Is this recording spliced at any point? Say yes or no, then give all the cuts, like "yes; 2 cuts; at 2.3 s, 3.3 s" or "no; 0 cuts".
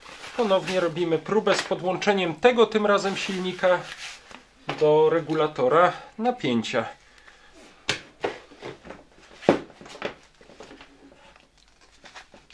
no; 0 cuts